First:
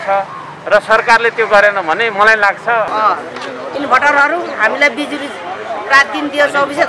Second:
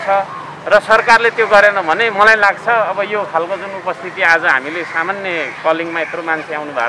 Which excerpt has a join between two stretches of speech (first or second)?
first